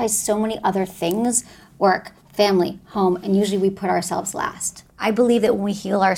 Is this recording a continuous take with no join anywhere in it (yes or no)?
no